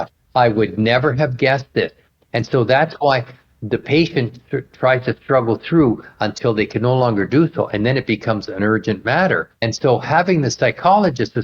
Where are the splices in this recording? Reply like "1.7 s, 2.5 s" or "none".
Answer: 9.5 s